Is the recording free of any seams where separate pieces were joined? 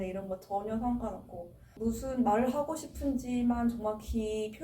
no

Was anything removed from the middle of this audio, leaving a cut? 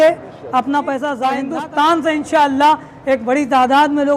yes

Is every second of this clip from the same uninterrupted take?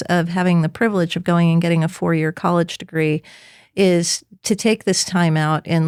yes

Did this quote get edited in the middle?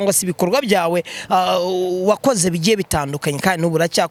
no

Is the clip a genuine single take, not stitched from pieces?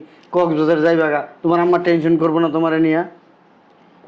yes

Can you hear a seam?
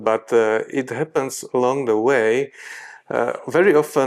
no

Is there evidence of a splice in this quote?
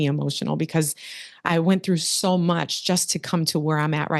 no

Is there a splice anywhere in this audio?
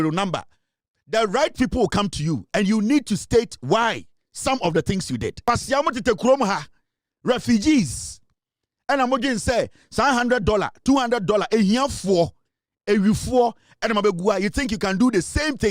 yes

